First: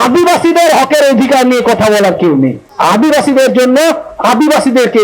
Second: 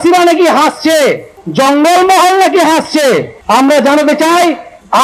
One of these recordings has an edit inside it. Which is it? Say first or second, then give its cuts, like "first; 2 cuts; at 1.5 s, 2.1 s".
second; 1 cut; at 3.4 s